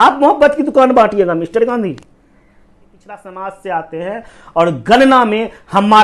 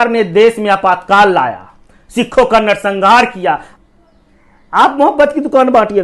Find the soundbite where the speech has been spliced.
first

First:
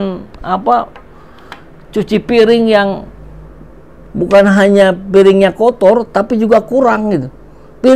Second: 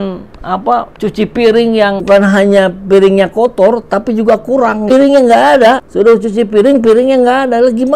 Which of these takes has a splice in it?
second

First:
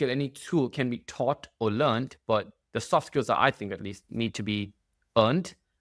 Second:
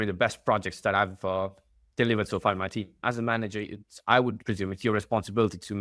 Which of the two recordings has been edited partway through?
second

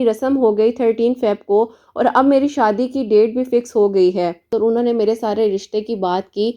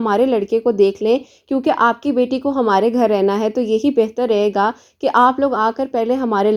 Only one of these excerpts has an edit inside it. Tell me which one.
first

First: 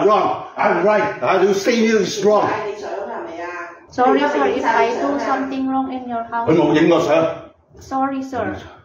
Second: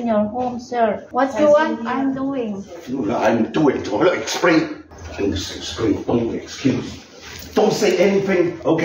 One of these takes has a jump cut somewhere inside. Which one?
second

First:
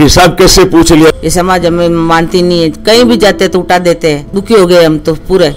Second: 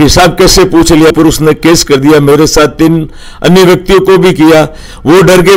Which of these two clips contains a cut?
first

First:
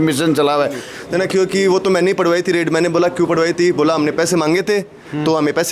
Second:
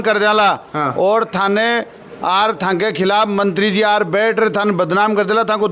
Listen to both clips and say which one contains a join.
first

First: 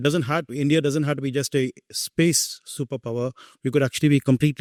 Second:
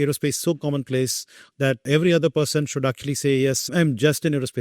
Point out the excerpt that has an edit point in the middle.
second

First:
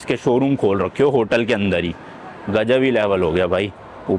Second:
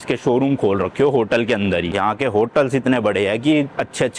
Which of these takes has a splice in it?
second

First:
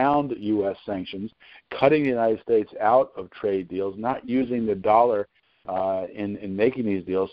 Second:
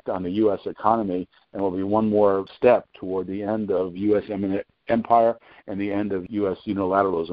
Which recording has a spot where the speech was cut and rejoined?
second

